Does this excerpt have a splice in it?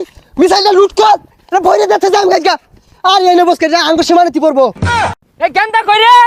yes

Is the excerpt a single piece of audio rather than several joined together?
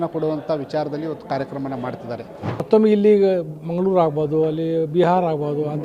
no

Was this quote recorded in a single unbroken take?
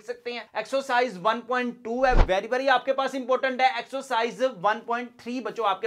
yes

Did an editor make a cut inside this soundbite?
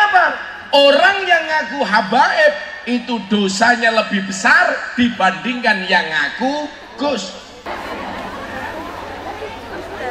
yes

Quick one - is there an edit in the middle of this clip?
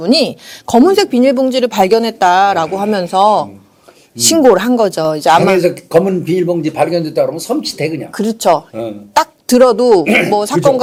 no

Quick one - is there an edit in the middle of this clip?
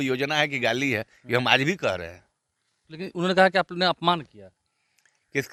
no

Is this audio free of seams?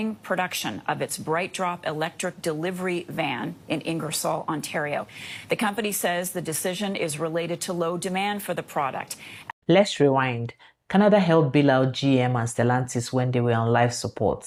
yes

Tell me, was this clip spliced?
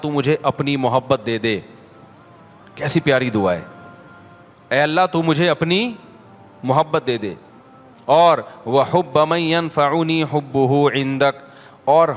no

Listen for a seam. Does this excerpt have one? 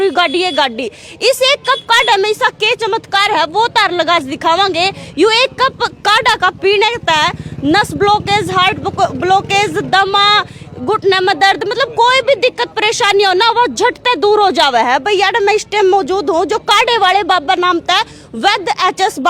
no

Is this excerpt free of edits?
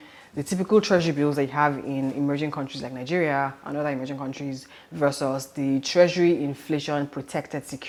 yes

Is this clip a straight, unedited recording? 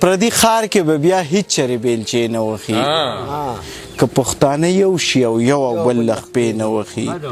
yes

